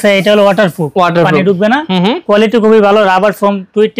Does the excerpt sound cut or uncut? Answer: uncut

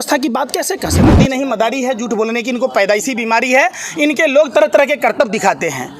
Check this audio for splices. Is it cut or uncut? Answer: cut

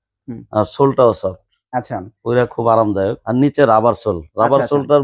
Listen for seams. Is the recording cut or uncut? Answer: cut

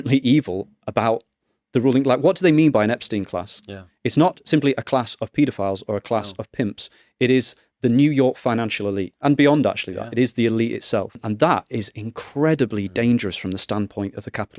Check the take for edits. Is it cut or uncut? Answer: cut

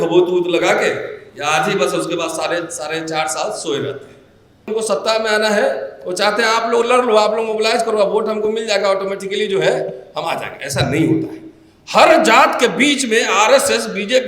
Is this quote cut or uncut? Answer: cut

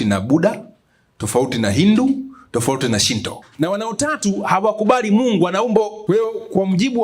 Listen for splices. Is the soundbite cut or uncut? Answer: cut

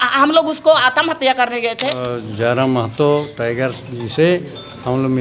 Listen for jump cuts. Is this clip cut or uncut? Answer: cut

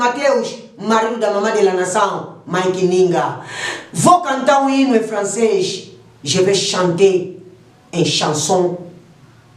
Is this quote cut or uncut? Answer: uncut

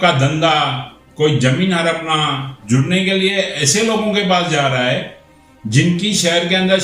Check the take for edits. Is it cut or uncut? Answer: cut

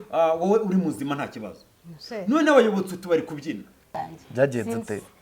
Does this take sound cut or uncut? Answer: cut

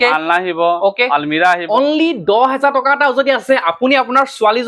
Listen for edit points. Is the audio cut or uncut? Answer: cut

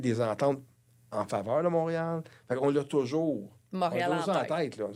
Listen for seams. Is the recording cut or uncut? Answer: uncut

